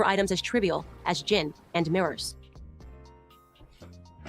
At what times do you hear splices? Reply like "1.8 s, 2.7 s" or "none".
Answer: none